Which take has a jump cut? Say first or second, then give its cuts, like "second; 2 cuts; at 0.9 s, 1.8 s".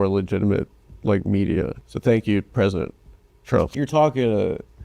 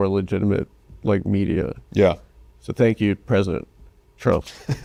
first; 2 cuts; at 1.8 s, 3.7 s